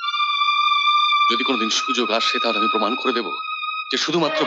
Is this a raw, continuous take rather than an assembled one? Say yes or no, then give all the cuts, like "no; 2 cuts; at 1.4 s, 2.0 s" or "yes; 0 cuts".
yes; 0 cuts